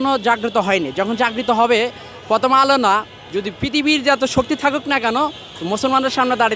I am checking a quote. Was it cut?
no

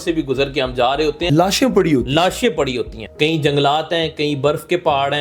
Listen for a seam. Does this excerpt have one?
yes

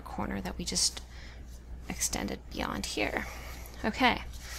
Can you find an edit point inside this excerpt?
yes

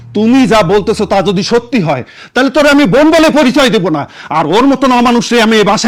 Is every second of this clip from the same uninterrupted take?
yes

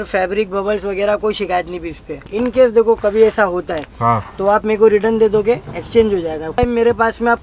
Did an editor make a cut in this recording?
yes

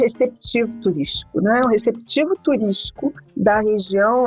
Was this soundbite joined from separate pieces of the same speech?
yes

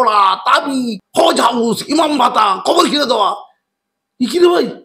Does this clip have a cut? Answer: yes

